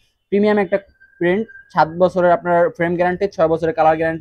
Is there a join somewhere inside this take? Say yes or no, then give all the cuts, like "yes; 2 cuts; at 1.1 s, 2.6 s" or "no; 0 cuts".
no; 0 cuts